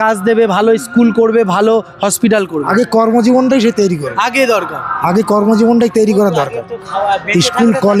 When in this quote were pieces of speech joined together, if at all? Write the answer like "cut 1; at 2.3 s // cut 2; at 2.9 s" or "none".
none